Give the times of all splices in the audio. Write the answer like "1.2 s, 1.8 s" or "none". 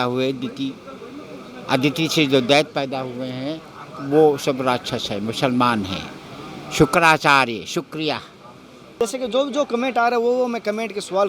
8.9 s